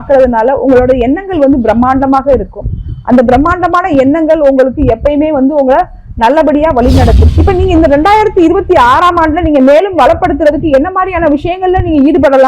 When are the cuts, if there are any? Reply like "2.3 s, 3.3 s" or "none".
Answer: 7.3 s